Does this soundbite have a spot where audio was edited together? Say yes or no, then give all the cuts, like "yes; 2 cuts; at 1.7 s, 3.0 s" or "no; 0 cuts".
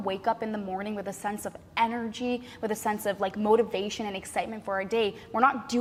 no; 0 cuts